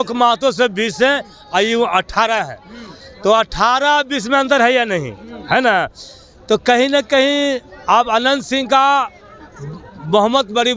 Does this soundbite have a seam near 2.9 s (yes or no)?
no